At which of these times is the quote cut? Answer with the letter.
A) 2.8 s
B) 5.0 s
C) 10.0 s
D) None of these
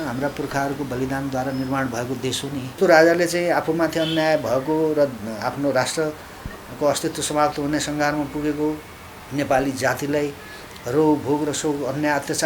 A